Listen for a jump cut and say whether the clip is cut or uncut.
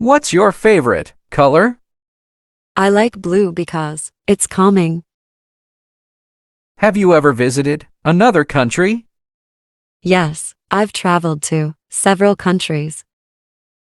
cut